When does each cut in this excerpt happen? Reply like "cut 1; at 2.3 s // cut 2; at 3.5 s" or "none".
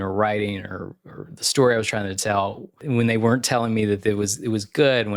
cut 1; at 2.8 s